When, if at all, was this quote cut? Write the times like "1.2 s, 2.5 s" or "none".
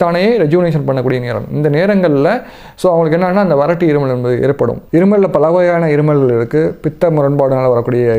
4.8 s